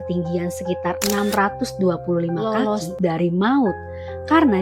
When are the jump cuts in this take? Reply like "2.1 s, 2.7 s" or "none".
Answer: 2.8 s